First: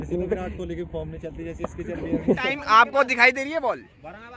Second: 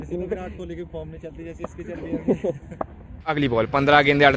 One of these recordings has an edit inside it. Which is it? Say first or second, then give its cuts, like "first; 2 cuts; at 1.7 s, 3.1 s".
first; 1 cut; at 2.4 s